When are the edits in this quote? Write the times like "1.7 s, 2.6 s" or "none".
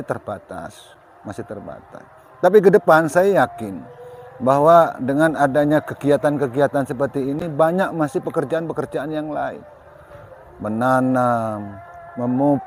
none